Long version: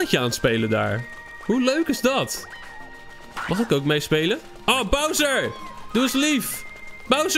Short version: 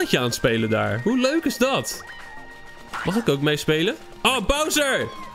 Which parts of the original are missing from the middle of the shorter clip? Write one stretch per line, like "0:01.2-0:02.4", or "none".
0:00.9-0:01.4